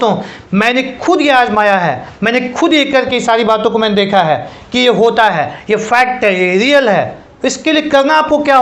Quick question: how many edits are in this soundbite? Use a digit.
0